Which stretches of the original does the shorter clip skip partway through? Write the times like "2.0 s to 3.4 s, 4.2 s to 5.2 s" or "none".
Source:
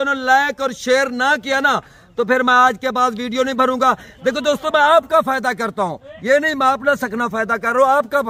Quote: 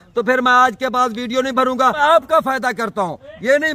4.0 s to 4.8 s